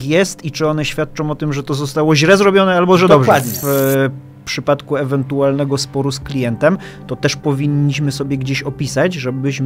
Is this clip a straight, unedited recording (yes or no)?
no